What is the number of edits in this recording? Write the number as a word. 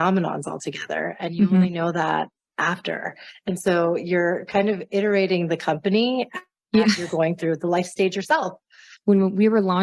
one